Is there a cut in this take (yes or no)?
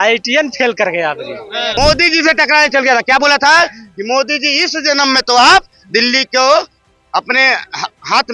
yes